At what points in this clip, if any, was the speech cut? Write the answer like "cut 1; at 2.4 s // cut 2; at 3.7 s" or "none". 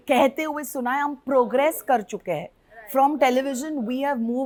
none